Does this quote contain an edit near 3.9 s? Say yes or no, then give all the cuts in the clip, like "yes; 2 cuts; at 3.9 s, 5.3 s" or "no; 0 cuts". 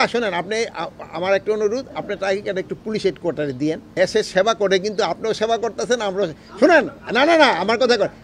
yes; 1 cut; at 3.9 s